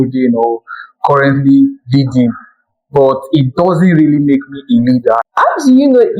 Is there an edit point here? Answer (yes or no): yes